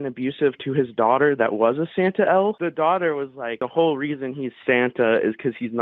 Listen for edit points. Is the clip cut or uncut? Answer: cut